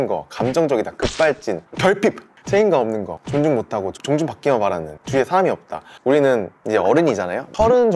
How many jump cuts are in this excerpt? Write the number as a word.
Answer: five